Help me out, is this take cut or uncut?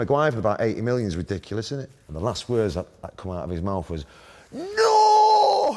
cut